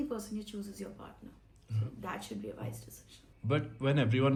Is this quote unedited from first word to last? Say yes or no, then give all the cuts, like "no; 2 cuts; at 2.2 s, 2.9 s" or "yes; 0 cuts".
yes; 0 cuts